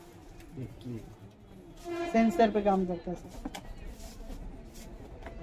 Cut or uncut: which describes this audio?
uncut